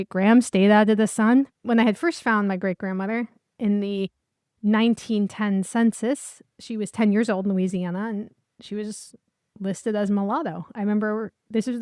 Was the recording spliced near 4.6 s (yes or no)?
no